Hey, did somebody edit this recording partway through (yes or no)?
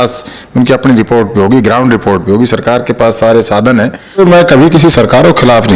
yes